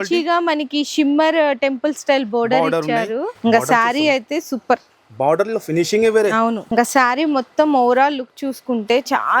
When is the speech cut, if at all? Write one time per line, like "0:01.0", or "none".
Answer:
0:03.3
0:06.6